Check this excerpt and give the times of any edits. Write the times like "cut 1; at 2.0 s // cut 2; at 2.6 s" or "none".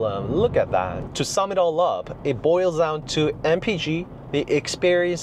cut 1; at 1.0 s